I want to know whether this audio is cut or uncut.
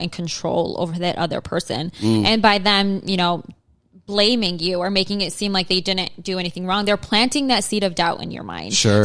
uncut